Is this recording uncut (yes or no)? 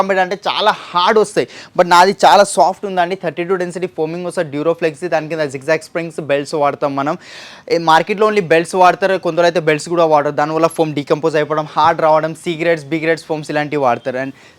yes